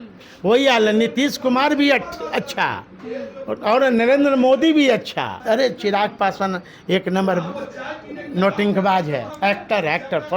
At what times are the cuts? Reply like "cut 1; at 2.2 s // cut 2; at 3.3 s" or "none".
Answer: cut 1; at 5.4 s // cut 2; at 9.3 s